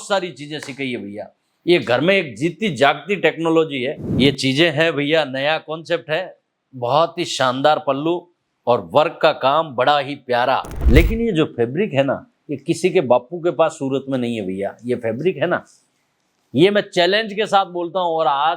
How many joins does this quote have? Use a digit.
2